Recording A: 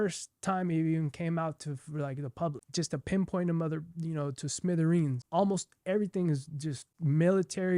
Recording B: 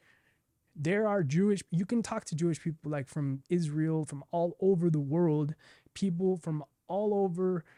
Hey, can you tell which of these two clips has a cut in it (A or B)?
A